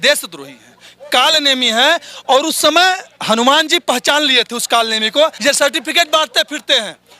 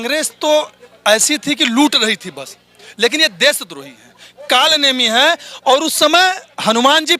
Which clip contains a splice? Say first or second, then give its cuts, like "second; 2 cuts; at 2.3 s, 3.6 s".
first; 1 cut; at 5.4 s